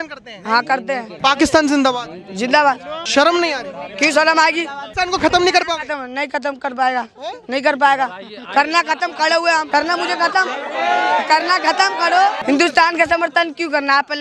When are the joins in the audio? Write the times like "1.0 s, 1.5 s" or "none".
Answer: 1.1 s, 2.9 s, 4.8 s, 9.7 s, 12.4 s